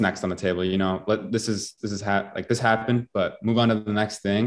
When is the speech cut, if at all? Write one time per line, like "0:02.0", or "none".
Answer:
none